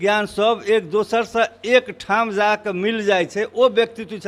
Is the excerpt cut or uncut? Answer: uncut